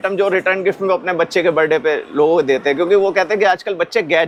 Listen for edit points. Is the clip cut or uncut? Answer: uncut